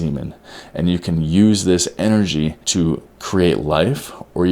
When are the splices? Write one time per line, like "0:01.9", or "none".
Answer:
0:02.6

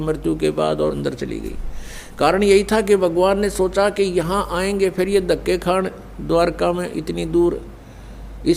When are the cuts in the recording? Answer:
0:01.0

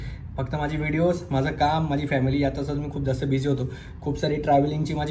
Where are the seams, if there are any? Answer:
none

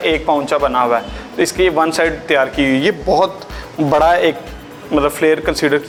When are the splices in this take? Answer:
none

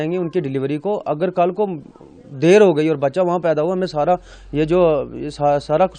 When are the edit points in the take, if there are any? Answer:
none

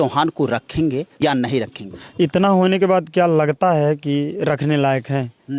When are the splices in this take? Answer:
0:01.1

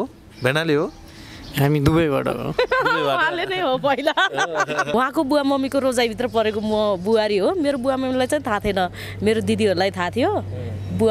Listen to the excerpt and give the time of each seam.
0:04.9

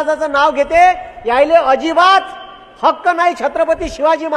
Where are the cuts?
none

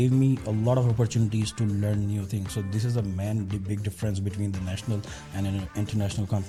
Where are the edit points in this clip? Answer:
none

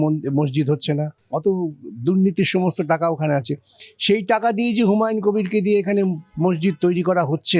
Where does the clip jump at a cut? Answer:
0:01.2

